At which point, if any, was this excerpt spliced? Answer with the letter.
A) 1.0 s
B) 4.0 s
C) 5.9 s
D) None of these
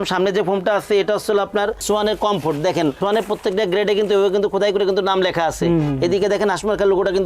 D